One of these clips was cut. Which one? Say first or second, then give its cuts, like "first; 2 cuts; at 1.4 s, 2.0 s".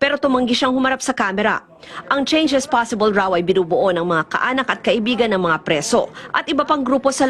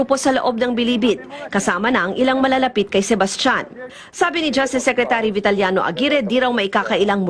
second; 1 cut; at 3.6 s